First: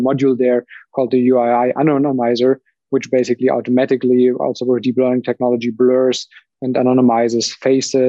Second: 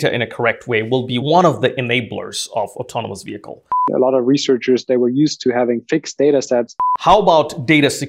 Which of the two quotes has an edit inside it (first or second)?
second